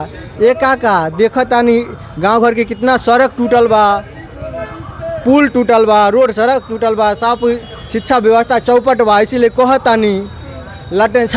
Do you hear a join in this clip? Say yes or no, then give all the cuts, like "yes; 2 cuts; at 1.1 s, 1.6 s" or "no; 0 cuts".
no; 0 cuts